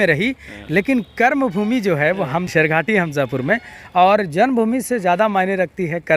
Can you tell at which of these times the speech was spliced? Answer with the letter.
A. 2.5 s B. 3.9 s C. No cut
A